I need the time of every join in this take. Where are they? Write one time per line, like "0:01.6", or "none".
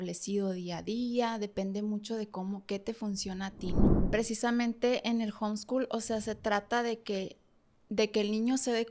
0:03.9